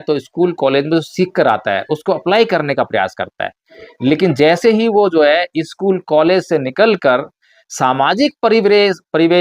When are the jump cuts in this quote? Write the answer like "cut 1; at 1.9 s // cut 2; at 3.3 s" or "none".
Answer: none